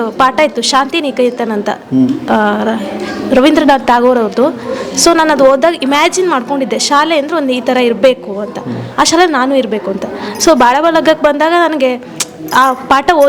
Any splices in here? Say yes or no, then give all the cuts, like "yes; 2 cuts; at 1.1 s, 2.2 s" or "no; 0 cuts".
no; 0 cuts